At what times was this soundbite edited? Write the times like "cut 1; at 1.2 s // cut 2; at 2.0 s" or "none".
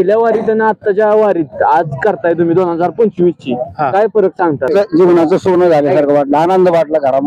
cut 1; at 4.7 s